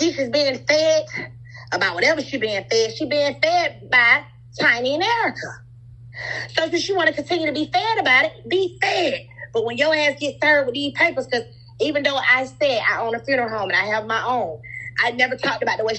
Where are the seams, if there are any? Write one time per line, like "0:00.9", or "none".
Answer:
none